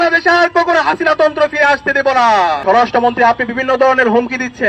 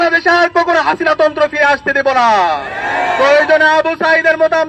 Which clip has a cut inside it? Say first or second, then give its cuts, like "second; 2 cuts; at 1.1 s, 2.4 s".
first; 1 cut; at 2.6 s